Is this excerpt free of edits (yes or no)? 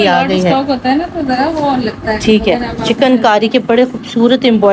yes